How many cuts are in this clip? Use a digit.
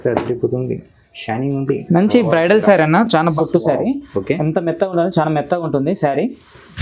1